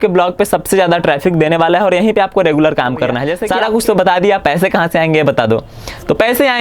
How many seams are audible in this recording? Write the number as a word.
one